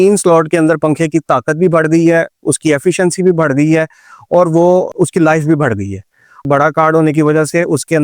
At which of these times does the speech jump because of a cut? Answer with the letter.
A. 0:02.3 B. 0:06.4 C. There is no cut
B